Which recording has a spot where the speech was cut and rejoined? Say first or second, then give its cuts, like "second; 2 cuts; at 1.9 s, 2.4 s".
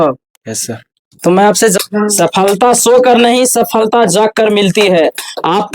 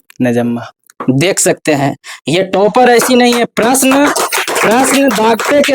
first; 1 cut; at 1.8 s